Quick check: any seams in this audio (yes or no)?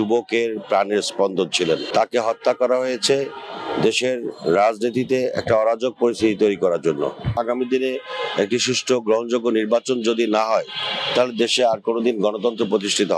yes